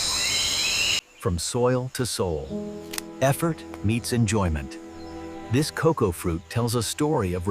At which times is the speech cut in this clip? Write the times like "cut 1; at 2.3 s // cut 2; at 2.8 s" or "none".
cut 1; at 1.0 s